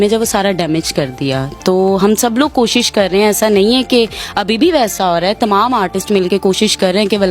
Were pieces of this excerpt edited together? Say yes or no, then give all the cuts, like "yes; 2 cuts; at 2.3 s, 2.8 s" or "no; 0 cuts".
no; 0 cuts